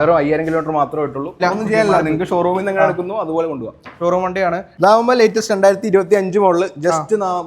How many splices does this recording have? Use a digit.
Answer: 2